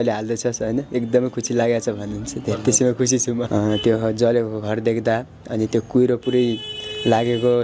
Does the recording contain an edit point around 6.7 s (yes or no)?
no